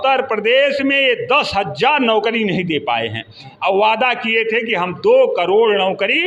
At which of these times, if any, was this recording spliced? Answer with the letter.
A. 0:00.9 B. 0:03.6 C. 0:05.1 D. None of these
D